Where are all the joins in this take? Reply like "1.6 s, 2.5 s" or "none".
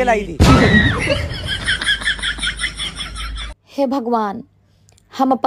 3.4 s